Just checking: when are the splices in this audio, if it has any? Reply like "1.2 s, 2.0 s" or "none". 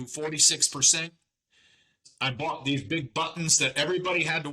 2.1 s